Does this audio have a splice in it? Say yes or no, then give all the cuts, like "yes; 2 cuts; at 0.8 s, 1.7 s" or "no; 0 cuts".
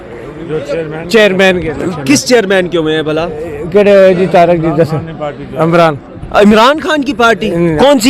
no; 0 cuts